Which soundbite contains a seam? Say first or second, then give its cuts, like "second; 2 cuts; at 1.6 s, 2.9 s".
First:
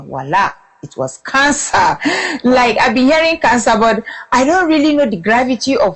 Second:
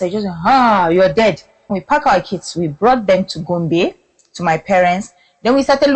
second; 1 cut; at 1.7 s